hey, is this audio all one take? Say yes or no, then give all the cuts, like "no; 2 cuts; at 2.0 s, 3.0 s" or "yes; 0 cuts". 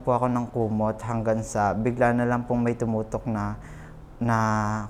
yes; 0 cuts